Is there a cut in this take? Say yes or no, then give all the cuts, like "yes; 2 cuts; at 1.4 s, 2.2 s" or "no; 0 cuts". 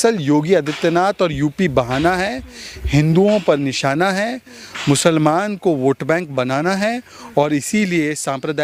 no; 0 cuts